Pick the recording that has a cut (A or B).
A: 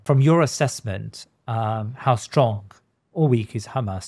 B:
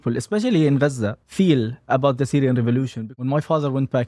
B